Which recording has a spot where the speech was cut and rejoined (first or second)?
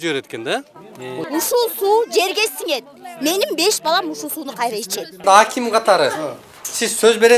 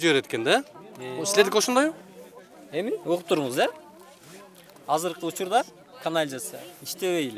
first